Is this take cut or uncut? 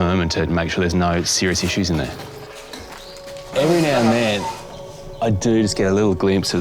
uncut